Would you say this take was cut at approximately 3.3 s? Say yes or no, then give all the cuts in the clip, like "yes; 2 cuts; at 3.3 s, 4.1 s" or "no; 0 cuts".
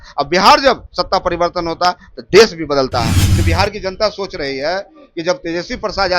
yes; 1 cut; at 3.3 s